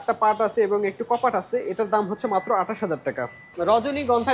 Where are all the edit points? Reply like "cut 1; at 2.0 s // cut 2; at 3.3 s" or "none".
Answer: cut 1; at 3.4 s